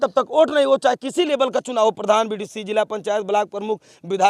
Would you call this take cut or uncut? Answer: uncut